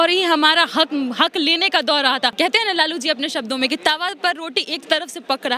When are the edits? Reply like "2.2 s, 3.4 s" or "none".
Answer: 2.3 s